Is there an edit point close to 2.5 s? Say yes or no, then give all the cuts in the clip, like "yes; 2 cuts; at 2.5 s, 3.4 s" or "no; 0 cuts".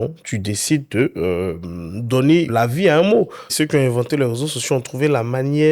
yes; 2 cuts; at 2.5 s, 3.5 s